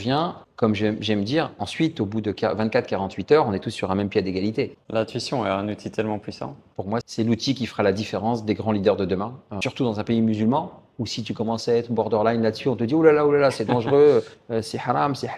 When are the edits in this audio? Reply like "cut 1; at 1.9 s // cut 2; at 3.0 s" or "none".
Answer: cut 1; at 4.8 s // cut 2; at 9.6 s